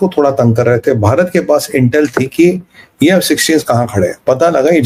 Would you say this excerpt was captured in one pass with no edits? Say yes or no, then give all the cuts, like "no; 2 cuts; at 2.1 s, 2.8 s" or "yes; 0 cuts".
yes; 0 cuts